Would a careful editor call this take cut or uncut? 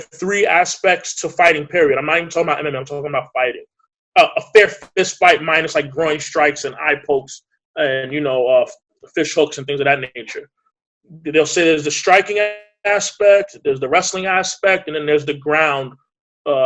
uncut